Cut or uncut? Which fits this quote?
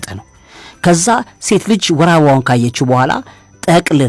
uncut